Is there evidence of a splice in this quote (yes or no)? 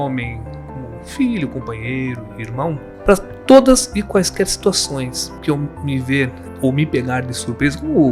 yes